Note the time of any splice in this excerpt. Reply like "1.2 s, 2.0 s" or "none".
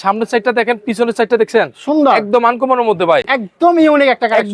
none